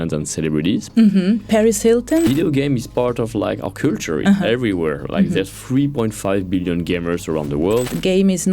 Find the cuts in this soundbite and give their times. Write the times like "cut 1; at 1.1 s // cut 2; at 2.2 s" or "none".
cut 1; at 2.2 s // cut 2; at 7.8 s